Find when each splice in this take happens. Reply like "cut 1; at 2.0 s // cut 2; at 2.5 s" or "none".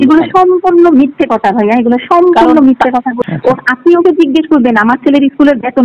cut 1; at 3.2 s